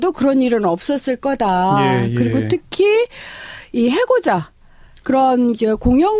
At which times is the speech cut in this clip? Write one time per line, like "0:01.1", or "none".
0:01.6